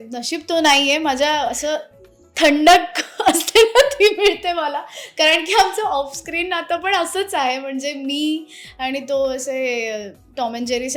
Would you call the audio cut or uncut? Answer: uncut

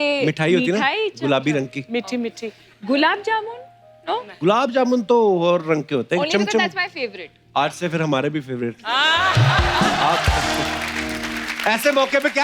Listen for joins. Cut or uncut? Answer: uncut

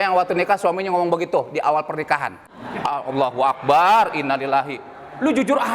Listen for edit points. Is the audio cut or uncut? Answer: cut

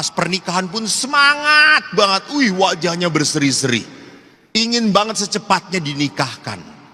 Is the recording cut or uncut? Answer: uncut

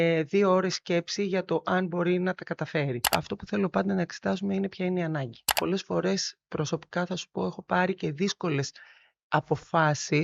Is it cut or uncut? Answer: cut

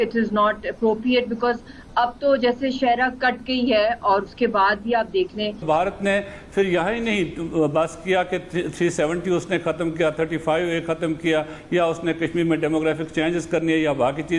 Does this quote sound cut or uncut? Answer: cut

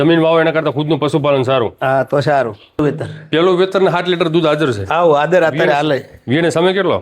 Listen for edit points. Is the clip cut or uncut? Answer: cut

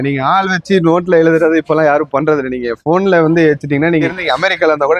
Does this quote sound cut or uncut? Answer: cut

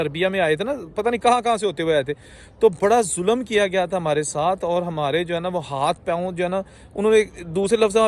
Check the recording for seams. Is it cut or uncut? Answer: uncut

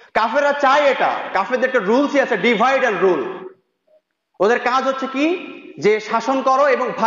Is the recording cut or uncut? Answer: uncut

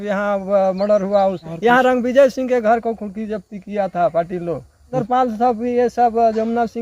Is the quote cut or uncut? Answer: cut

